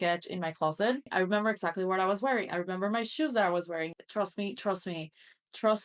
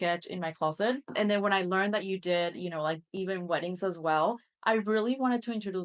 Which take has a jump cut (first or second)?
first